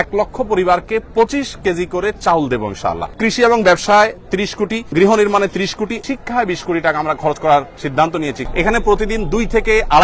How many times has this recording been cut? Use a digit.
4